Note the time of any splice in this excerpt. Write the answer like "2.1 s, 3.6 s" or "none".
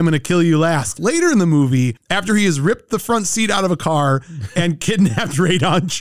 1.0 s